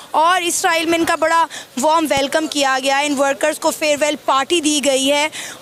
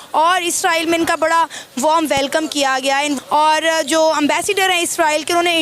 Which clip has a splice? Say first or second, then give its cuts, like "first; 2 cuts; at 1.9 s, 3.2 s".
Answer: second; 1 cut; at 3.2 s